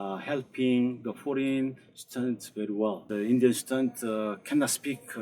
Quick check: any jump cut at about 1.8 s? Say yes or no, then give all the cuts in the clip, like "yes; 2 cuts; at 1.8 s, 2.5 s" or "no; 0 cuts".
no; 1 cut; at 3.0 s